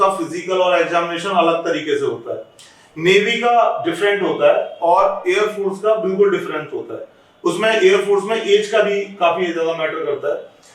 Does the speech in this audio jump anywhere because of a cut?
no; 0 cuts

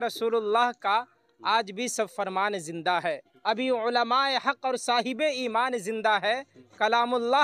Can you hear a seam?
no; 0 cuts

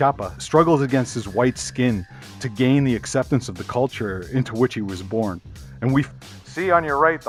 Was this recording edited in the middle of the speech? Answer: no; 0 cuts

